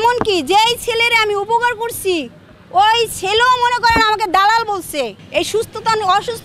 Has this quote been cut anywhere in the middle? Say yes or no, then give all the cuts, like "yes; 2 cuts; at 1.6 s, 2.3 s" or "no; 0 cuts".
yes; 1 cut; at 5.2 s